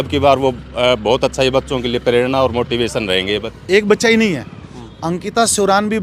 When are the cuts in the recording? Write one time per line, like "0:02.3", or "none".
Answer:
0:03.5